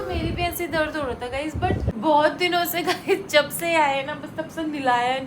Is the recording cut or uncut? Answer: cut